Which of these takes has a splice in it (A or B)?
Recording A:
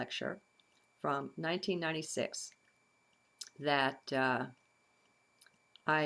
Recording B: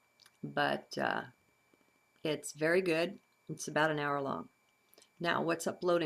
B